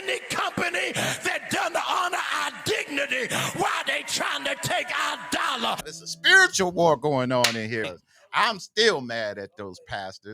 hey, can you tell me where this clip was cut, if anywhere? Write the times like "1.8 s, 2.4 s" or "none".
5.8 s, 7.9 s

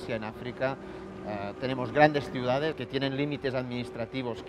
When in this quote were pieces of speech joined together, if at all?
2.8 s

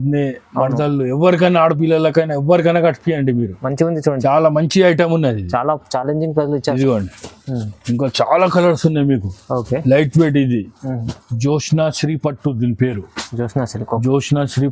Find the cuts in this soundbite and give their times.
6.8 s

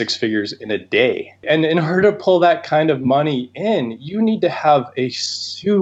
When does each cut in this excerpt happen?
1.4 s

